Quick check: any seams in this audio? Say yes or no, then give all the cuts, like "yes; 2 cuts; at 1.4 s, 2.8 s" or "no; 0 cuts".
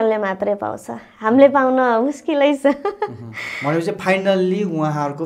no; 0 cuts